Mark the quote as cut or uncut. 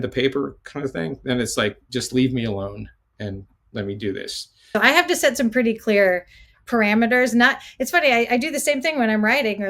cut